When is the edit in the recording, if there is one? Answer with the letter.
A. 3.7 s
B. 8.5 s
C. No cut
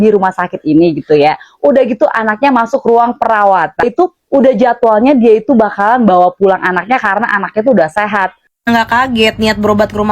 B